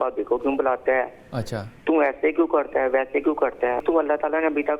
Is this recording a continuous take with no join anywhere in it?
no; 1 cut; at 3.8 s

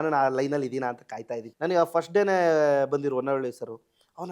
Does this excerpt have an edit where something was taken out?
yes; 1 cut; at 1.4 s

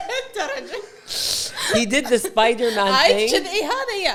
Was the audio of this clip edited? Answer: no; 0 cuts

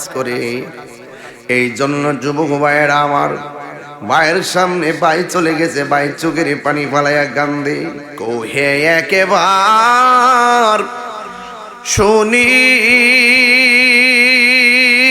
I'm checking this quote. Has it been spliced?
yes; 1 cut; at 8.1 s

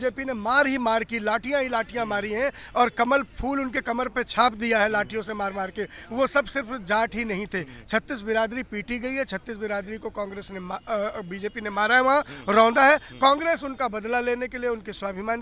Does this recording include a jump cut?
no; 0 cuts

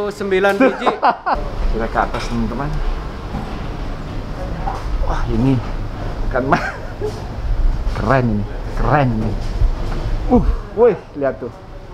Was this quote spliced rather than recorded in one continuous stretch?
yes; 1 cut; at 1.4 s

